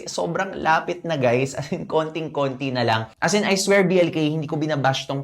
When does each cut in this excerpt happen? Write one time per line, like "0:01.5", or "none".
0:03.1